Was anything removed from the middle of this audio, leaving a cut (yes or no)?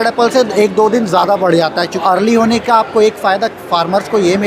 yes